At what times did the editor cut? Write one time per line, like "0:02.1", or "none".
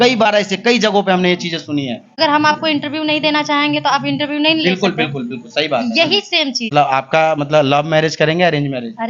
0:02.2
0:06.7